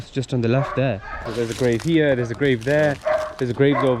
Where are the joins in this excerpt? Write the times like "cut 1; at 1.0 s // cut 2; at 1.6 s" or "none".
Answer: cut 1; at 1.3 s